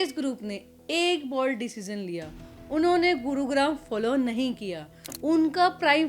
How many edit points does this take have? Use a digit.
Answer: 1